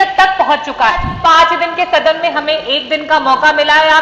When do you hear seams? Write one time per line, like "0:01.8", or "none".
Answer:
0:01.1